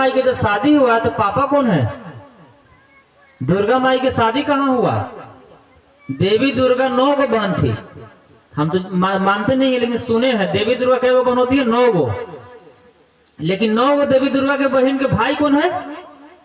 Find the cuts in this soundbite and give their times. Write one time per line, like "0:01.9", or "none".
none